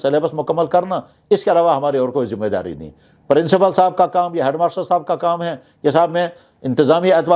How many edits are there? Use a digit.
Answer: 0